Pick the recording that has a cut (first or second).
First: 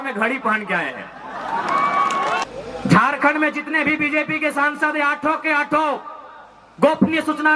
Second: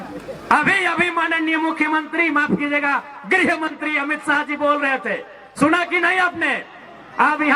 first